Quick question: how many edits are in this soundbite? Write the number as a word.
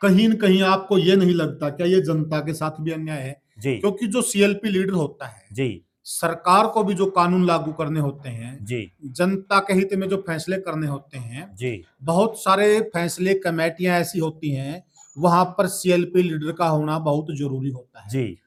zero